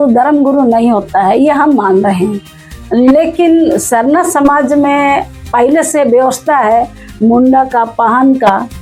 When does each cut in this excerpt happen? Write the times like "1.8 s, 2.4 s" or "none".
none